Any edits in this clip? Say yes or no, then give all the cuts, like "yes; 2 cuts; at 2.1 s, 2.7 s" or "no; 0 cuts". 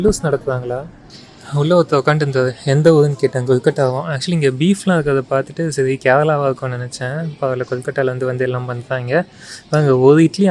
no; 0 cuts